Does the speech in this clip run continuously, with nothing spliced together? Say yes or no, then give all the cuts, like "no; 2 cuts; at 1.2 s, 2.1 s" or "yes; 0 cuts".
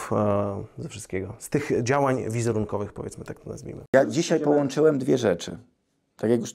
no; 1 cut; at 3.7 s